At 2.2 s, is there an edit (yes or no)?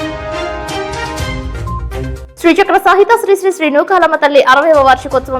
yes